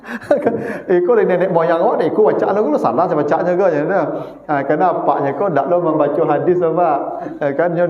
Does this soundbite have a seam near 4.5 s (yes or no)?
no